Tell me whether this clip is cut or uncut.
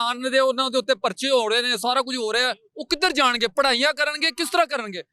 uncut